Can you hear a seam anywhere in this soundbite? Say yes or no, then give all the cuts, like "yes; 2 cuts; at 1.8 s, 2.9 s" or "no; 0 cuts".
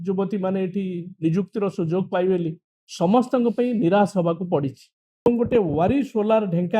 yes; 1 cut; at 5.3 s